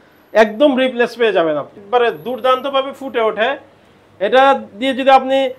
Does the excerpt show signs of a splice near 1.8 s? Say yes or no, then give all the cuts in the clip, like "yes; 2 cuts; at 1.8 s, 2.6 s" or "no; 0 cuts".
yes; 1 cut; at 1.8 s